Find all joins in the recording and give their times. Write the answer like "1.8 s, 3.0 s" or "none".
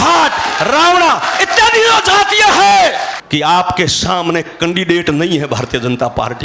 3.1 s